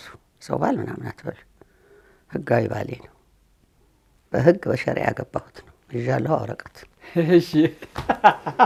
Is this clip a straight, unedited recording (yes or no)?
yes